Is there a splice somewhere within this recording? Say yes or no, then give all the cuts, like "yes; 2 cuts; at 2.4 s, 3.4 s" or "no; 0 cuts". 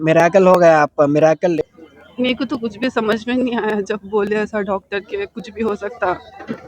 yes; 1 cut; at 1.6 s